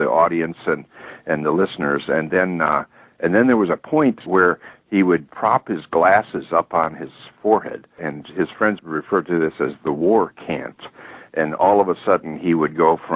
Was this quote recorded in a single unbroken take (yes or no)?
no